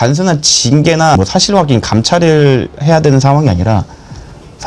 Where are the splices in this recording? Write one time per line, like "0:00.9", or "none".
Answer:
0:01.2

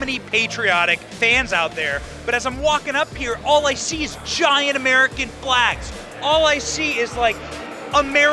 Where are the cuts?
0:01.1

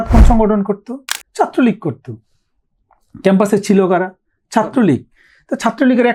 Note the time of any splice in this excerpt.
none

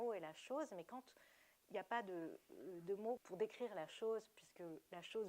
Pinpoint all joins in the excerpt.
0:03.2

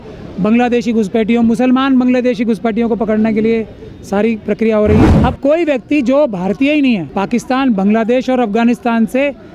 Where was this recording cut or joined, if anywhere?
0:05.1
0:07.1

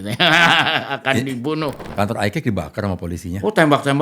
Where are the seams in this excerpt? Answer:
0:01.8

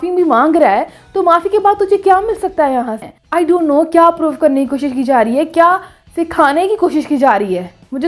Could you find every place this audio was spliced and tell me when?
0:03.1

